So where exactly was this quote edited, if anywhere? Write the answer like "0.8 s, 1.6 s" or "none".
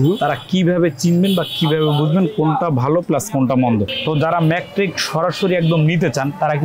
4.0 s